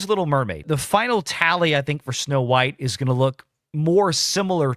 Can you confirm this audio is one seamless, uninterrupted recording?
yes; 0 cuts

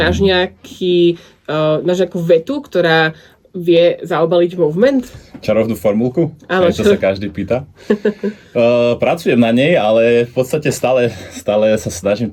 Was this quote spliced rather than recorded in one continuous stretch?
no; 0 cuts

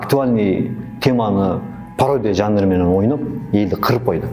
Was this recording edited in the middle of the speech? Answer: no; 0 cuts

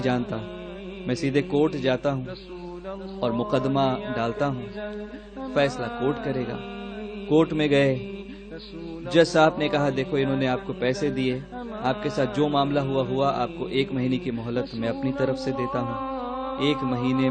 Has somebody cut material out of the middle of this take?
yes; 1 cut; at 16.2 s

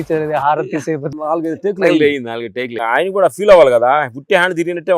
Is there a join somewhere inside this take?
yes; 2 cuts; at 1.0 s, 2.8 s

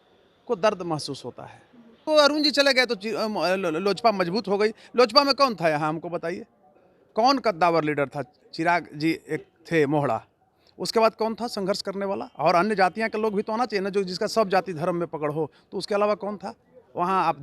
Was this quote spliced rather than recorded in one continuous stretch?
yes; 1 cut; at 2.0 s

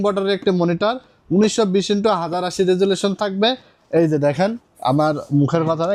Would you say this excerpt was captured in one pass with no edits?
yes; 0 cuts

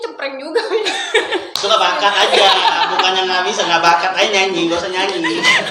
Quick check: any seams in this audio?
no; 0 cuts

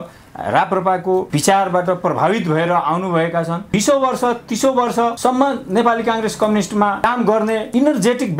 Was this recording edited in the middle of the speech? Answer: yes; 4 cuts; at 1.3 s, 3.6 s, 5.2 s, 7.3 s

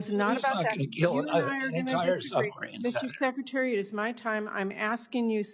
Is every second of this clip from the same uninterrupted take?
yes; 0 cuts

